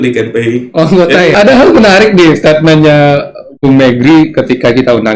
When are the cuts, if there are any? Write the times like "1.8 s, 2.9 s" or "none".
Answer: 1.3 s